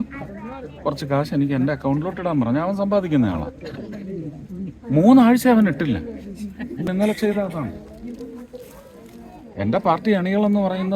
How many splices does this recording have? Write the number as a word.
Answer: one